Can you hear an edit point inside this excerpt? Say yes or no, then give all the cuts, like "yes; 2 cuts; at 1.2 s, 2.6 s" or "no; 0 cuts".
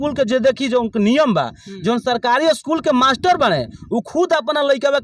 no; 0 cuts